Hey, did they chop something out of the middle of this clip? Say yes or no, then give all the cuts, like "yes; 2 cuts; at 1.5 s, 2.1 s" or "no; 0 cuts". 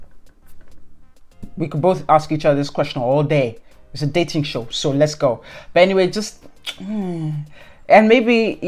no; 0 cuts